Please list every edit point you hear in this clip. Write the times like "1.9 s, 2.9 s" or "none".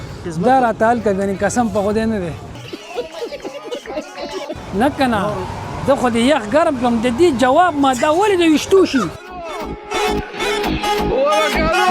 4.5 s, 9.3 s

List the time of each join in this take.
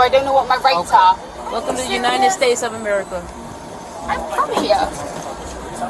1.3 s

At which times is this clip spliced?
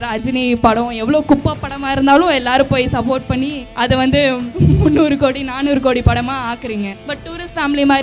3.6 s, 4.5 s, 7.0 s

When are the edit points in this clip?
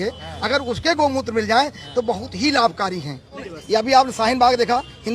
3.5 s

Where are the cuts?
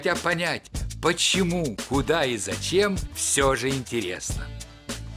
4.2 s

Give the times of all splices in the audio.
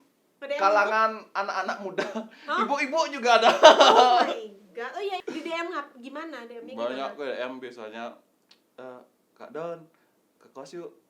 5.2 s

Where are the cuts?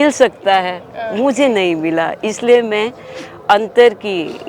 none

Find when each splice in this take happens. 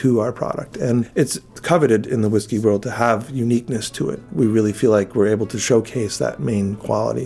1.3 s, 4.2 s

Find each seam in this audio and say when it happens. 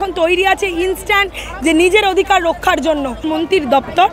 3.2 s

